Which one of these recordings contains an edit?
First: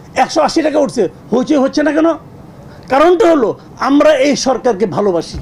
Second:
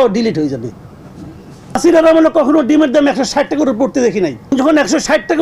second; 2 cuts; at 1.8 s, 4.5 s

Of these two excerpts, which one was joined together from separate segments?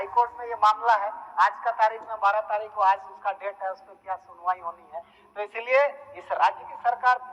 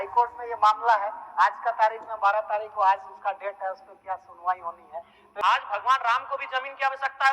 second; 1 cut; at 5.2 s

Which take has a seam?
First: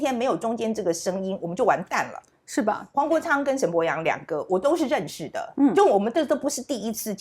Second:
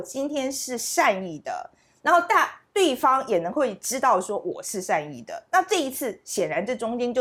first; 1 cut; at 2.8 s

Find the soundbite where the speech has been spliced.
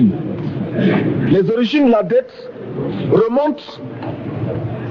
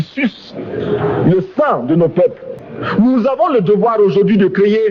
second; 1 cut; at 2.6 s

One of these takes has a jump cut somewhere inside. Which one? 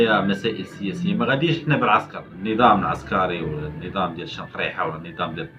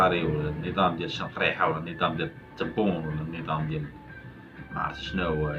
first; 1 cut; at 2.2 s

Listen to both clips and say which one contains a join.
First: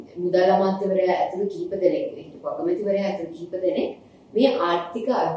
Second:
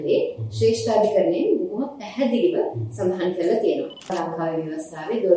second; 1 cut; at 4.1 s

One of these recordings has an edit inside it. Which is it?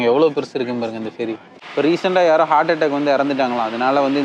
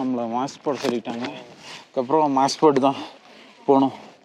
first; 1 cut; at 1.5 s

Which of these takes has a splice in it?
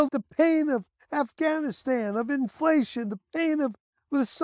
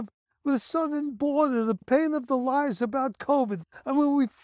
second; 1 cut; at 1.8 s

